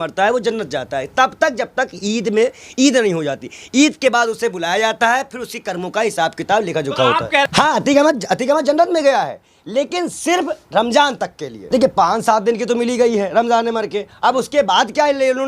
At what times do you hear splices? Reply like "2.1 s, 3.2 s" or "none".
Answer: 7.5 s, 11.6 s